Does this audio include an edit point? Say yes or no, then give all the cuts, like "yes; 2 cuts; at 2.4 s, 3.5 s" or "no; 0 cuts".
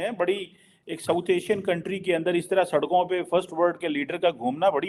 no; 0 cuts